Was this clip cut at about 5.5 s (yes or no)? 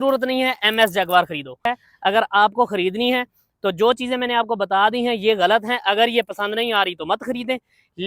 no